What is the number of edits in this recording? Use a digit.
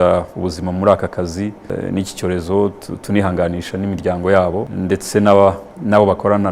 2